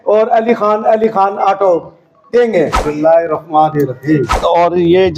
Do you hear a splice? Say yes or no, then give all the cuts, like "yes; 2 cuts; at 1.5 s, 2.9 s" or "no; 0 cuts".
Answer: yes; 2 cuts; at 2.8 s, 4.4 s